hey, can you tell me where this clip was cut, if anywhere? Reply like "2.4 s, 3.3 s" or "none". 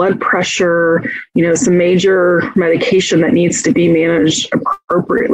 none

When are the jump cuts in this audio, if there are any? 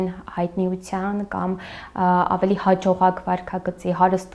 none

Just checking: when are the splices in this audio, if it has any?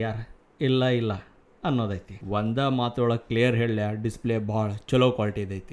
2.1 s

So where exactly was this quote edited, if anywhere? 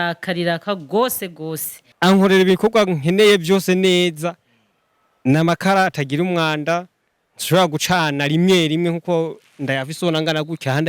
1.9 s

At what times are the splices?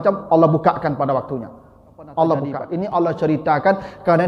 2.6 s

